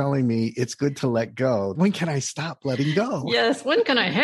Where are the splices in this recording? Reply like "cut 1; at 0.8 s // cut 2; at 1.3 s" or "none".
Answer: cut 1; at 1.7 s